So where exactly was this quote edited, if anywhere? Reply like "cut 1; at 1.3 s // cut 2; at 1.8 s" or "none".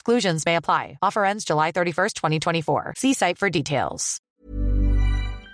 cut 1; at 4.3 s

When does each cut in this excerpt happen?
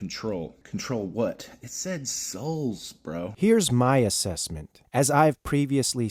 cut 1; at 3.3 s

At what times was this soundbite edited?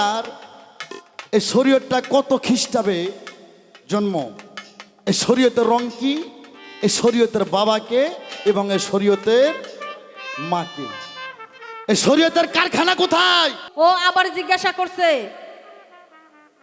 cut 1; at 13.6 s

